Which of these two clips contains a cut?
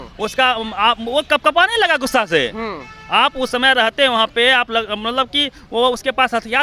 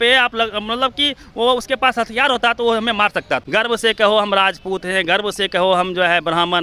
second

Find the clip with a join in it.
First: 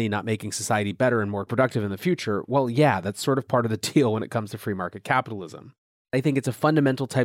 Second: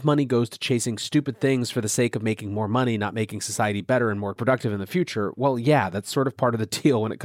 first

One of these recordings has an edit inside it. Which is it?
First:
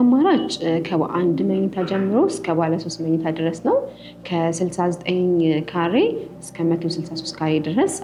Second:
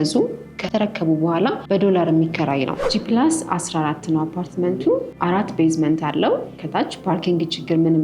second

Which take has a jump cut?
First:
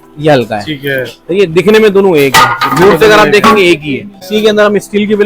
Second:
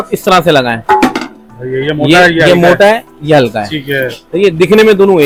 first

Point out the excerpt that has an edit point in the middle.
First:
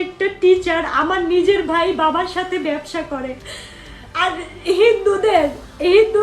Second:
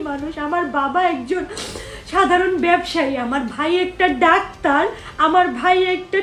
first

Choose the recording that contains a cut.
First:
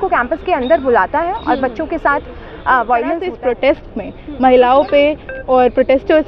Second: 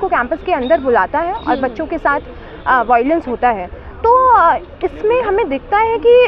first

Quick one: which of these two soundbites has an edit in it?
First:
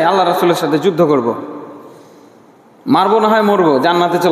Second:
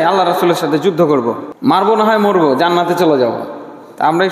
second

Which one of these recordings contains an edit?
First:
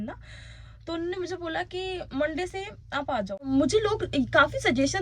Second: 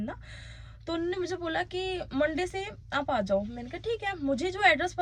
first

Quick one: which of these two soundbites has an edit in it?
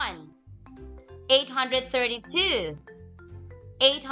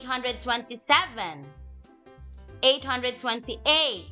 second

